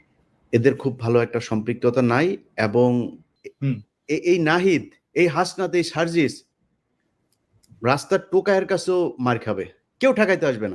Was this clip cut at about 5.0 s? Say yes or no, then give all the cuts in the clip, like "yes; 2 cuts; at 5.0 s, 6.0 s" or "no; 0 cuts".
no; 1 cut; at 3.2 s